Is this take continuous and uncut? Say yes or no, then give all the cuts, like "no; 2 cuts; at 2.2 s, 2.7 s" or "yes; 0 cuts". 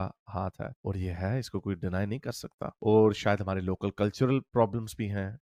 yes; 0 cuts